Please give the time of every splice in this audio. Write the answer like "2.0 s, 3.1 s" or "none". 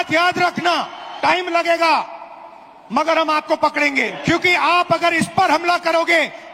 1.0 s, 4.1 s

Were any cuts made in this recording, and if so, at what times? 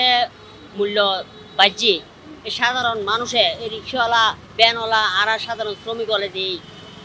none

